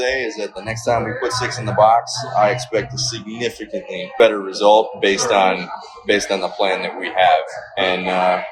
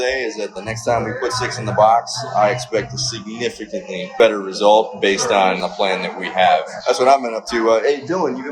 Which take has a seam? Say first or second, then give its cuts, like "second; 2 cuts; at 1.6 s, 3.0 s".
second; 2 cuts; at 5.7 s, 6.7 s